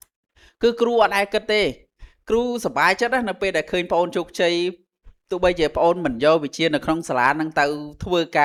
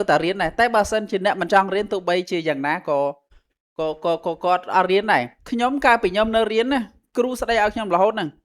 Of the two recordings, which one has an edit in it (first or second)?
second